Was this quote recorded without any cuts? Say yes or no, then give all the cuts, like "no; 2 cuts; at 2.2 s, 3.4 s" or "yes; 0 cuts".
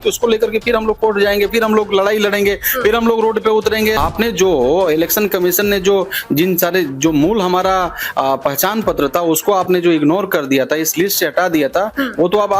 no; 1 cut; at 4.0 s